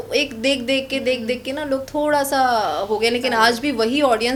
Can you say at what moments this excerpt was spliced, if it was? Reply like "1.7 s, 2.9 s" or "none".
none